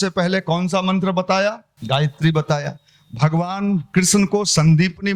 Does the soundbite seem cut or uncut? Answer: cut